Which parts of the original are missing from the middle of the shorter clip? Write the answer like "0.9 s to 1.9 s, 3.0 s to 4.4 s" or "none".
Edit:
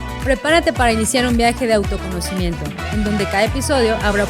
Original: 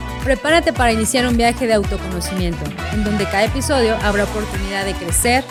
none

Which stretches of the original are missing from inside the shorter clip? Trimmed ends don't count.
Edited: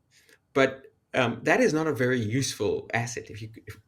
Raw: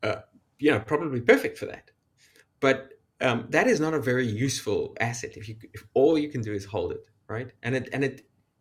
none

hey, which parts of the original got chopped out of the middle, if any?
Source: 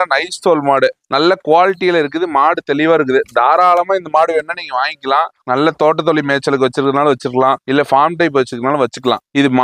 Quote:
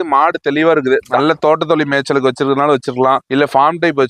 3.3 s to 5.5 s

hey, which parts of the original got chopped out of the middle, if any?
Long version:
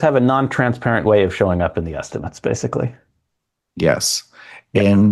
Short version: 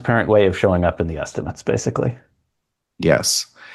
none

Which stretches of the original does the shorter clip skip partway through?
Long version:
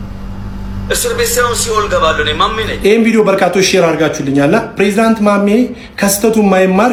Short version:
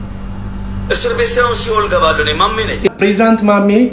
2.9 s to 4.7 s

